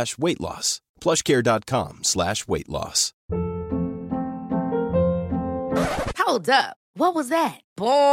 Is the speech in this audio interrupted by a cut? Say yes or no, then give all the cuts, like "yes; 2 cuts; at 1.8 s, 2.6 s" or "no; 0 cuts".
yes; 1 cut; at 3.1 s